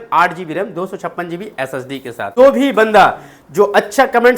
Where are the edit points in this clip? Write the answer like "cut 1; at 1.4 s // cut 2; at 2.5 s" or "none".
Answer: cut 1; at 2.3 s